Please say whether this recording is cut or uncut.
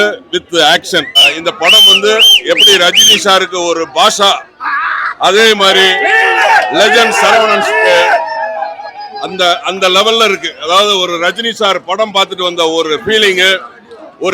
cut